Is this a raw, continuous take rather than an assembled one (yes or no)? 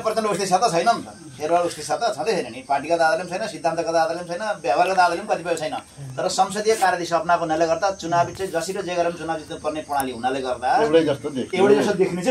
yes